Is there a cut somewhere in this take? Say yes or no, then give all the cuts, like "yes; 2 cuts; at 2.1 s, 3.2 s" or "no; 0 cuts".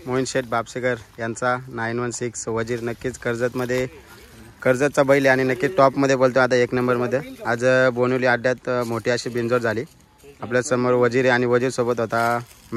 no; 0 cuts